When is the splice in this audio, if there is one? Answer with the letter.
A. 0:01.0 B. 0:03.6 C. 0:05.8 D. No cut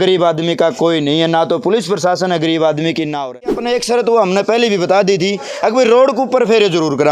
B